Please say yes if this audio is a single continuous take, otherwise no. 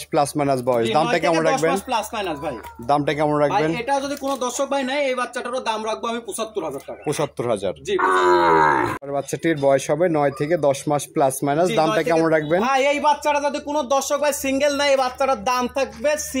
no